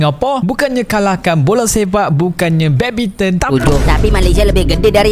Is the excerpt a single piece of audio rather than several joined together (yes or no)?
no